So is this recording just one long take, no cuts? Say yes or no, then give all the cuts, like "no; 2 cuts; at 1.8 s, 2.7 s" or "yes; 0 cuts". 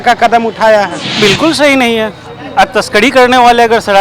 no; 1 cut; at 1.1 s